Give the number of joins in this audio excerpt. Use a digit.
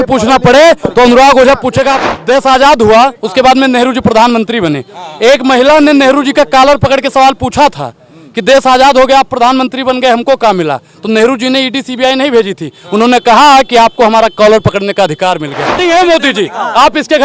2